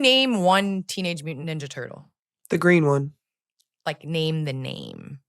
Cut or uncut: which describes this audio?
cut